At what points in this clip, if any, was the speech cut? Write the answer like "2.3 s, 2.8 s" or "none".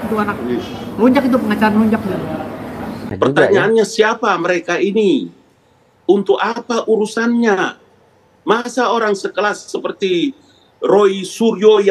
3.0 s